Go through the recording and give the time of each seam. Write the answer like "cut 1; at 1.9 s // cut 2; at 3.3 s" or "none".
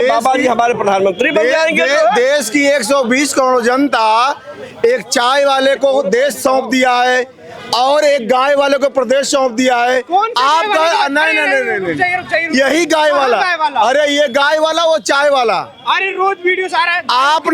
none